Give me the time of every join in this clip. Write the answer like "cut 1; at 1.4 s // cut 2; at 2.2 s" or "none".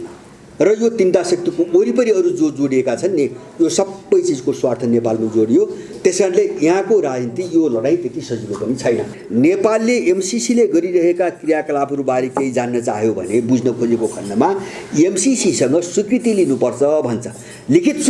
cut 1; at 9.2 s